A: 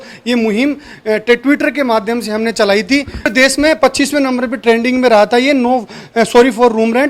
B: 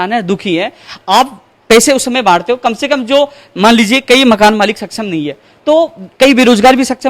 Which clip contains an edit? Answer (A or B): A